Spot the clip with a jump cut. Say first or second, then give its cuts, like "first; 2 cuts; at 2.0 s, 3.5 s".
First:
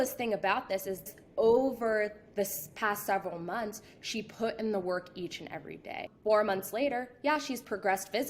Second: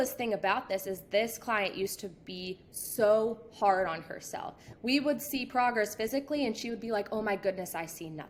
first; 2 cuts; at 1.1 s, 6.1 s